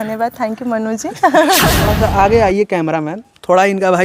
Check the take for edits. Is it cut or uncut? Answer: cut